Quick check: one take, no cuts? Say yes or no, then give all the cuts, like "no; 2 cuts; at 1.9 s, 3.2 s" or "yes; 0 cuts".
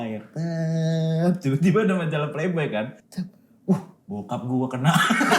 no; 1 cut; at 3.0 s